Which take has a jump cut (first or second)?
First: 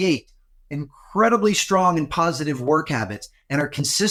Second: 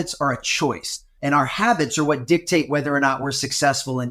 second